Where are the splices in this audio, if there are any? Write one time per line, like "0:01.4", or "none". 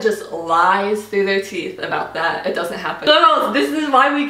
0:03.0